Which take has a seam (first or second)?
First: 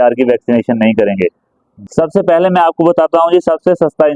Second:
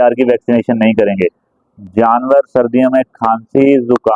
first